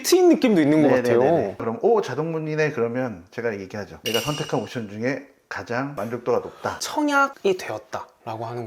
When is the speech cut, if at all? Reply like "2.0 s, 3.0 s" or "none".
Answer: 1.6 s, 6.8 s